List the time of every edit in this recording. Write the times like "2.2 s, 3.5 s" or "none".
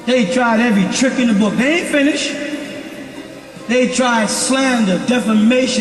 none